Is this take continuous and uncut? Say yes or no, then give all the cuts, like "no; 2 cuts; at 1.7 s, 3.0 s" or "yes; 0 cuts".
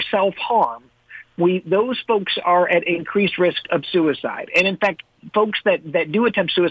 yes; 0 cuts